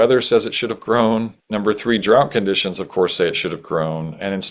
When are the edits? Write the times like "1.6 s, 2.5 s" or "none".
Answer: 1.4 s